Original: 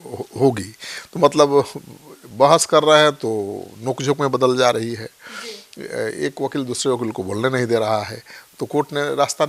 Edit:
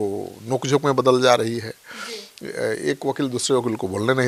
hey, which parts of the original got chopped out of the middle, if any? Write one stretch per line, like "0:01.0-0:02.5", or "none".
none